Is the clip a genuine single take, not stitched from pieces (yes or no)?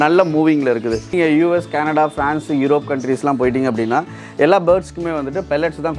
no